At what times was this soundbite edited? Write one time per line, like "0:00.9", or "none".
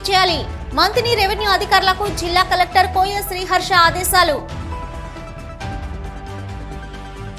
none